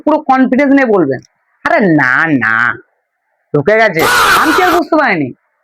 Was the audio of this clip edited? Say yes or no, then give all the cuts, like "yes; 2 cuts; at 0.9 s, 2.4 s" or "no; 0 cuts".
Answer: yes; 1 cut; at 4.2 s